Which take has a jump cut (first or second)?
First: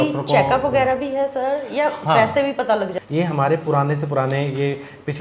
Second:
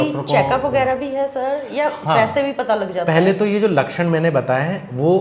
first